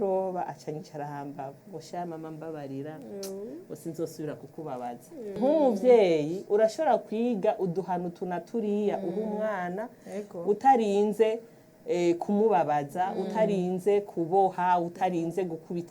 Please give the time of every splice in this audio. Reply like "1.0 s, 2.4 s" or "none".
5.4 s